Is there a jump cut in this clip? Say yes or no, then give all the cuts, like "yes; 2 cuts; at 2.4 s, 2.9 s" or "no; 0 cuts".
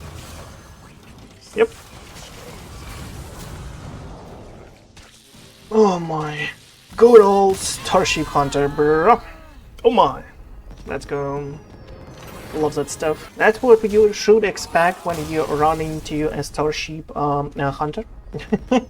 yes; 1 cut; at 13.3 s